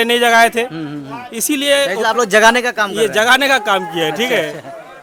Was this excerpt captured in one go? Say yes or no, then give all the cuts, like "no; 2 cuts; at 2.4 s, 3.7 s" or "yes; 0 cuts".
yes; 0 cuts